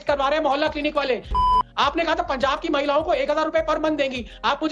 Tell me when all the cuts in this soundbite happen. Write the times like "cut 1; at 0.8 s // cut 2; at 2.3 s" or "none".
cut 1; at 1.4 s